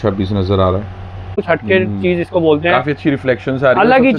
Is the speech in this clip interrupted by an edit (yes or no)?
yes